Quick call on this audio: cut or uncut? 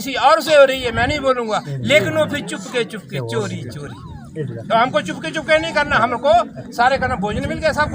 uncut